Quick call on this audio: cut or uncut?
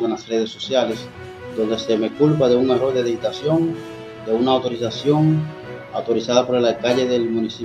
uncut